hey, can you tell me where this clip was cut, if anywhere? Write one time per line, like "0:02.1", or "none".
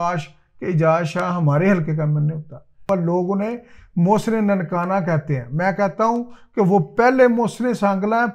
0:02.8